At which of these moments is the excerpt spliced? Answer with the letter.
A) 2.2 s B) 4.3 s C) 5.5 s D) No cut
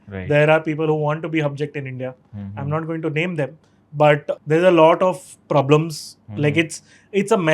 B